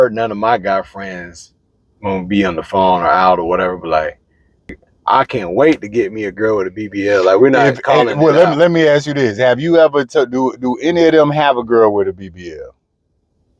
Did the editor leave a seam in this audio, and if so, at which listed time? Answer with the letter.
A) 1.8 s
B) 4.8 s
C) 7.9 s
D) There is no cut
B